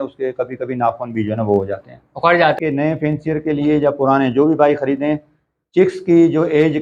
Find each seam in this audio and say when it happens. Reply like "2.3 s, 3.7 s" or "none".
2.6 s